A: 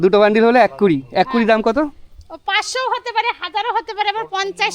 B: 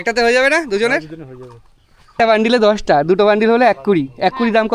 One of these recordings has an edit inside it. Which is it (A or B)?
B